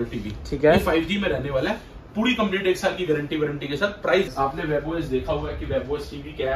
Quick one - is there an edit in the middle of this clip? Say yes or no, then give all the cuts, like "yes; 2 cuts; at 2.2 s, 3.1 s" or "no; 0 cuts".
yes; 1 cut; at 4.3 s